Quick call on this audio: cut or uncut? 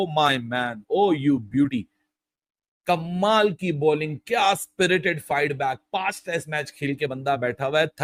uncut